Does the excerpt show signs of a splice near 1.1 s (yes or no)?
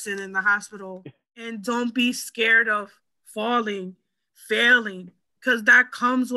yes